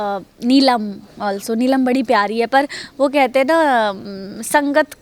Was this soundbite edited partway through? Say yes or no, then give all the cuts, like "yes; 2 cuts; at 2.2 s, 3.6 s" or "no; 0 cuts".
no; 0 cuts